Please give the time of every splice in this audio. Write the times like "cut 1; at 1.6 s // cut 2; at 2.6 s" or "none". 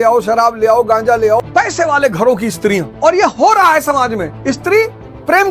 cut 1; at 1.4 s // cut 2; at 2.9 s // cut 3; at 4.3 s